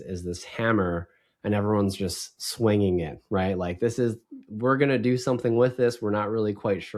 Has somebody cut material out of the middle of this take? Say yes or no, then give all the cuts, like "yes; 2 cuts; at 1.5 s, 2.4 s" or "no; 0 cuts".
no; 0 cuts